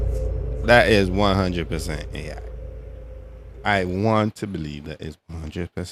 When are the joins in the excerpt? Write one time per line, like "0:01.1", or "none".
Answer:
none